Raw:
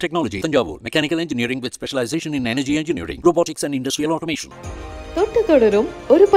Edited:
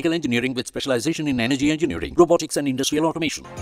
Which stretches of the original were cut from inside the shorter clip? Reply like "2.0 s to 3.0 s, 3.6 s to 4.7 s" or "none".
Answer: none